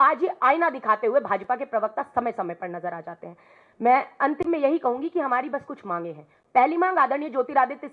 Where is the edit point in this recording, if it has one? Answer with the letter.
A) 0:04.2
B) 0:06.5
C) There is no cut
C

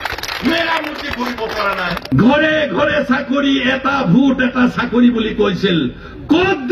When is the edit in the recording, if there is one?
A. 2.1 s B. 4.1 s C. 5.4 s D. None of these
A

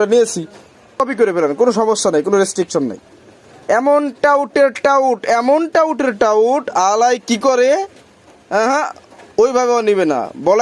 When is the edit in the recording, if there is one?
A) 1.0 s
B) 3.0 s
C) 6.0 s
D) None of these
A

